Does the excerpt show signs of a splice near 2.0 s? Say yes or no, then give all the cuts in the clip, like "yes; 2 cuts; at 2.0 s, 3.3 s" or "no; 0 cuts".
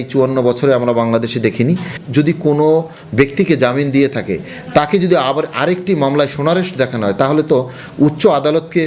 yes; 1 cut; at 2.0 s